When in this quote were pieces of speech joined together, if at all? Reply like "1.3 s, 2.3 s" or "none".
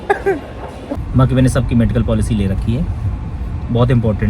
1.0 s